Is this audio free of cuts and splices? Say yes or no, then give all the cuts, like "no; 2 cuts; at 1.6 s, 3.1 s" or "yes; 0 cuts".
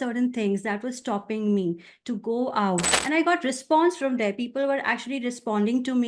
no; 1 cut; at 2.9 s